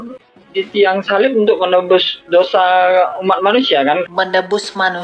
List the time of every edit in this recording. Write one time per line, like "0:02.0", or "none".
0:04.1